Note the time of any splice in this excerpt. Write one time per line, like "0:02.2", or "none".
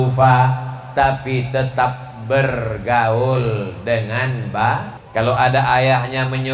0:05.0